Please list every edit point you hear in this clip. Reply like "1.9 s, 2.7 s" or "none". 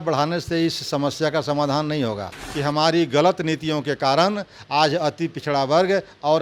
2.5 s